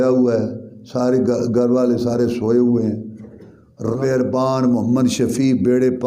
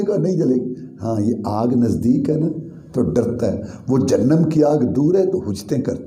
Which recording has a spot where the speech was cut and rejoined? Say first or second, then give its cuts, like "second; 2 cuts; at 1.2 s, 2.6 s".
first; 1 cut; at 3.9 s